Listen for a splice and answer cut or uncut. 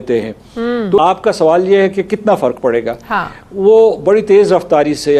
cut